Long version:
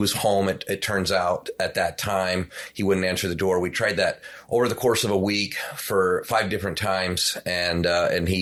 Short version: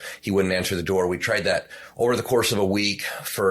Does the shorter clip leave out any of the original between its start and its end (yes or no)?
no